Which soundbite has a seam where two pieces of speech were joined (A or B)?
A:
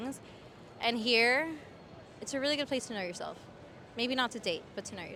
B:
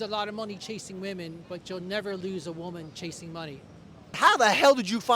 B